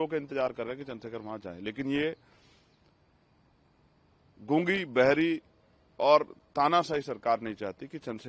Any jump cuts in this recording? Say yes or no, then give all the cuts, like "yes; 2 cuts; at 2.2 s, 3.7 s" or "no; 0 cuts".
no; 0 cuts